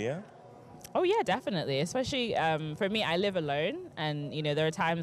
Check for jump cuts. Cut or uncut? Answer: uncut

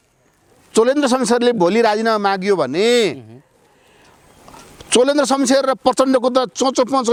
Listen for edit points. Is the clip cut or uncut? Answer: uncut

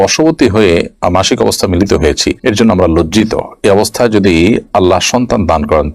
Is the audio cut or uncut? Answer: uncut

